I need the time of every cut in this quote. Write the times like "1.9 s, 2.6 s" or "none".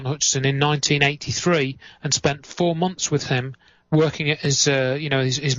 1.8 s